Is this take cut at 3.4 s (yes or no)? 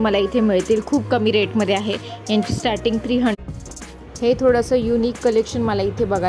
yes